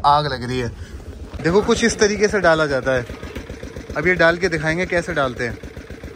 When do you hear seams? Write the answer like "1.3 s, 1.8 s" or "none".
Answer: 1.1 s